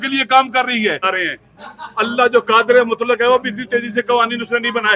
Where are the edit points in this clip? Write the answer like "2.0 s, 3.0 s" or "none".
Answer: 1.0 s